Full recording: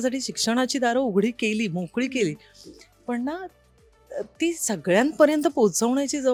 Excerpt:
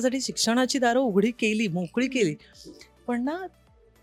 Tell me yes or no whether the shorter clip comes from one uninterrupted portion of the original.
yes